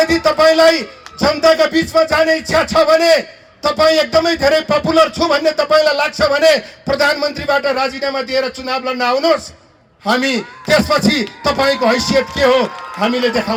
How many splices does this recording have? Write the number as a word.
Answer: zero